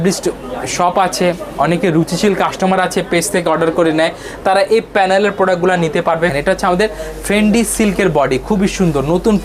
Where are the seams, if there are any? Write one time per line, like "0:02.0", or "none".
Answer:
0:06.3